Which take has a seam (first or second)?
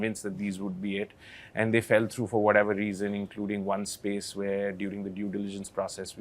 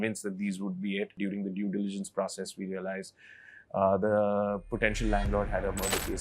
second